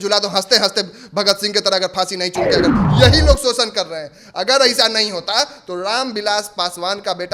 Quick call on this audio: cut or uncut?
cut